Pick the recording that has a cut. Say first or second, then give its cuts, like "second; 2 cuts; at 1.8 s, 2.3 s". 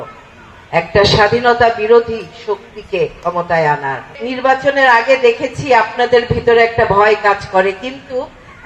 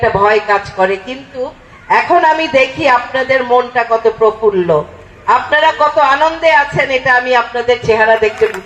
first; 1 cut; at 4.2 s